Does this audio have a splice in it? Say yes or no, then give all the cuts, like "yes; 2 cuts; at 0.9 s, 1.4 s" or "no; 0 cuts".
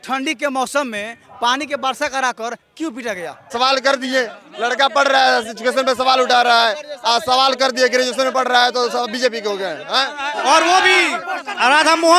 yes; 2 cuts; at 3.5 s, 10.3 s